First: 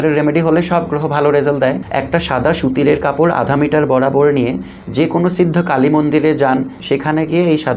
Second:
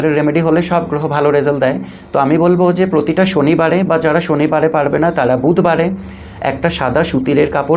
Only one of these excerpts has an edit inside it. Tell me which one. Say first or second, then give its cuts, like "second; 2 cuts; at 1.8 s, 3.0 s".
first; 2 cuts; at 1.8 s, 6.8 s